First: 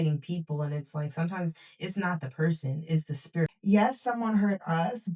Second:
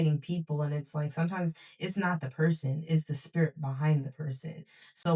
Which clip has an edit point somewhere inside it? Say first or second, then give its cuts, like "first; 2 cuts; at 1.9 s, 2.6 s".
first; 1 cut; at 3.6 s